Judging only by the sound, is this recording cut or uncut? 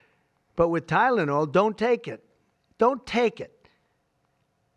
uncut